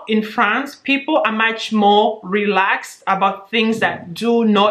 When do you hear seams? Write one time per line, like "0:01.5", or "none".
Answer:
none